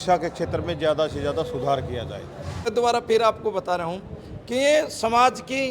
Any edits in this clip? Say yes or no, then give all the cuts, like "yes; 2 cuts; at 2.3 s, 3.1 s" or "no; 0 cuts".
yes; 1 cut; at 2.7 s